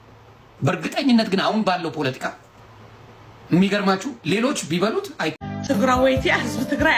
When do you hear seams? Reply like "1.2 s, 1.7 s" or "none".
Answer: 5.4 s